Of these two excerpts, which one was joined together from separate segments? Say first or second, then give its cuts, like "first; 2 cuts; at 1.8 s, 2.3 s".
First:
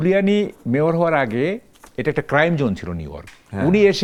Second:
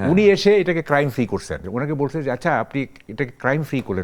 second; 1 cut; at 1.6 s